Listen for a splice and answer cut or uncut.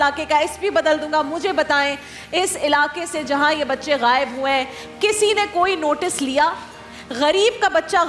uncut